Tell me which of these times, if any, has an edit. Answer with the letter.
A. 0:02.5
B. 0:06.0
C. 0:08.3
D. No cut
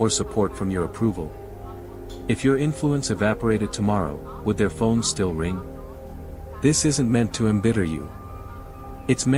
D